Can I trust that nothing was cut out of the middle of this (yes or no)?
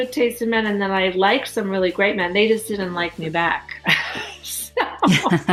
yes